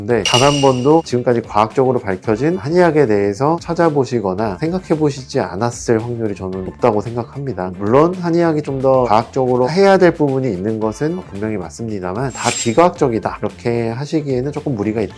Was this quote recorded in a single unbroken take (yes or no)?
yes